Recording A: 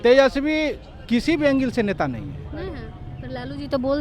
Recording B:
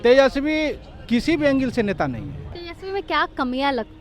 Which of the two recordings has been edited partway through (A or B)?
B